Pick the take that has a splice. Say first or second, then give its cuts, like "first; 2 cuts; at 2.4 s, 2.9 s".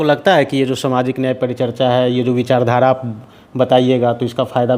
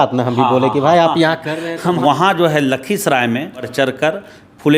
second; 2 cuts; at 2.0 s, 3.7 s